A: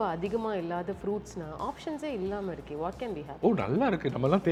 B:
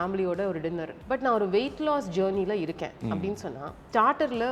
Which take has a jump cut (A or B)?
B